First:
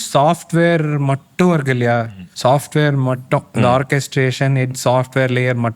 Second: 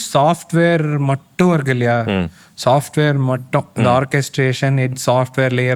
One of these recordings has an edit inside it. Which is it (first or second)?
first